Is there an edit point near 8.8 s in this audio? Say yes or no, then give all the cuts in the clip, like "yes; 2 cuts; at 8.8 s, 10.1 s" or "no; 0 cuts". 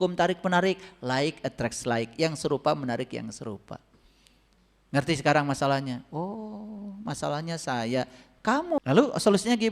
yes; 1 cut; at 8.8 s